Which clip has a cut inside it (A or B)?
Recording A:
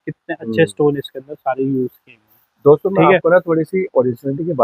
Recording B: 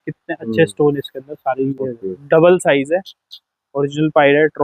B